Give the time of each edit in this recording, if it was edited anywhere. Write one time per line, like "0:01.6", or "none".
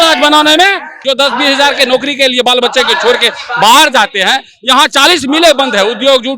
0:01.0

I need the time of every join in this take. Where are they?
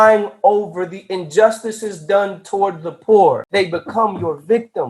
0:03.4

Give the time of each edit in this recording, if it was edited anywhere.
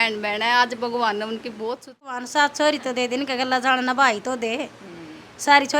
0:02.2

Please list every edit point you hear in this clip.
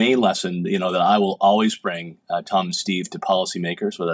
none

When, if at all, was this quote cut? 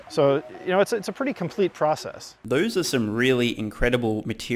none

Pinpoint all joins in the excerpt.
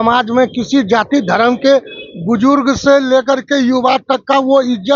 none

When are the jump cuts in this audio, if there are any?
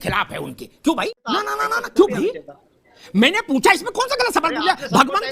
0:01.3

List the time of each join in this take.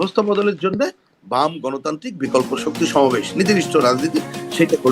none

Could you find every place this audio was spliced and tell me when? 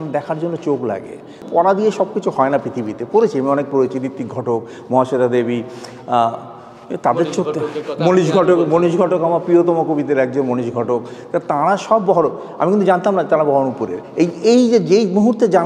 0:01.5

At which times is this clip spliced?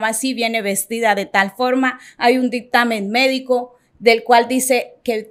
none

